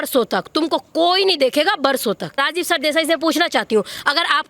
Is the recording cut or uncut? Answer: cut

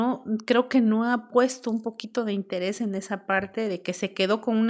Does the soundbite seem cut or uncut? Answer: uncut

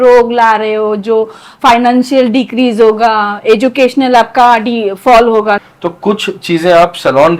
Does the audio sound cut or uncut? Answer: cut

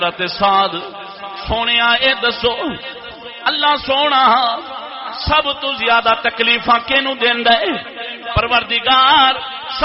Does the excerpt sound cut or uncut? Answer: uncut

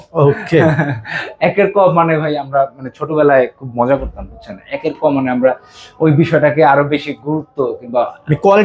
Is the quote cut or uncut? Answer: uncut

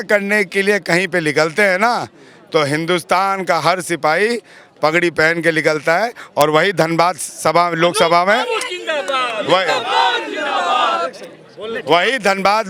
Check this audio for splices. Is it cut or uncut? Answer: uncut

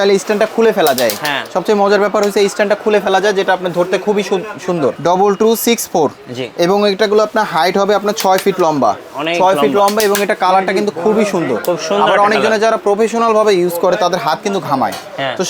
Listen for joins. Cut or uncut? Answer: cut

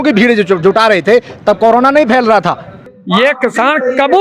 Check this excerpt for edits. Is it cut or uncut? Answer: cut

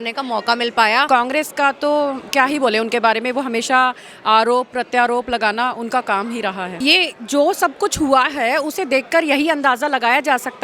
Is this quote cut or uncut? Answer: cut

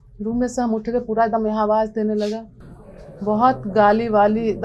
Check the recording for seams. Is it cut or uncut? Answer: uncut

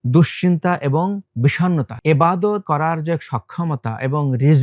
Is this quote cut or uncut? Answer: cut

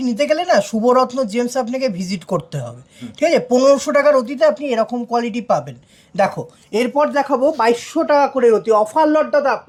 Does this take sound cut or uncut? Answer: uncut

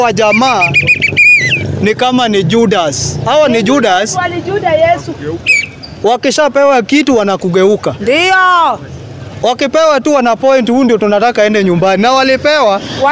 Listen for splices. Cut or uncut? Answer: uncut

